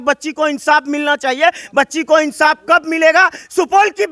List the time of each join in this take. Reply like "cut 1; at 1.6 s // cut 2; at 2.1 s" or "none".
none